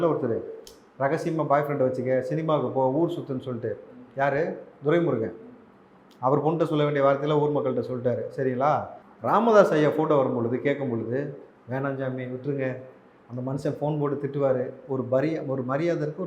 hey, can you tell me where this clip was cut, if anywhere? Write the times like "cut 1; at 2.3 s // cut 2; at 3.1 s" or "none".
cut 1; at 9.0 s